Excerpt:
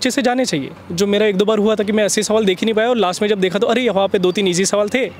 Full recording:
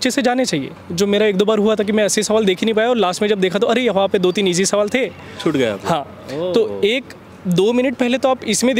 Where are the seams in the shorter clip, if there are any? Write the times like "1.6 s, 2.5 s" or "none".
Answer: none